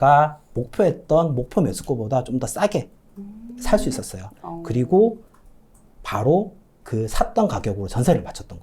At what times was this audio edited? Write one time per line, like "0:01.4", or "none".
none